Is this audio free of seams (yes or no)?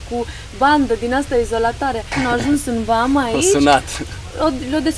no